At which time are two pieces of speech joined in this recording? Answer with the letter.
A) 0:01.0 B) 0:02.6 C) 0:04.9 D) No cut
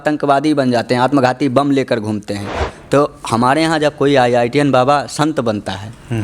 B